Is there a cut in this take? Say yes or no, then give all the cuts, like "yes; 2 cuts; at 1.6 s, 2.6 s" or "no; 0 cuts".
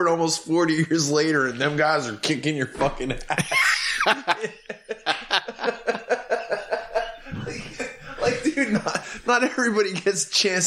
no; 0 cuts